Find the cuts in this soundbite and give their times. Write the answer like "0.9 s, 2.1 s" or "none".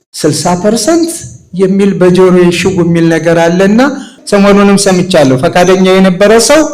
4.1 s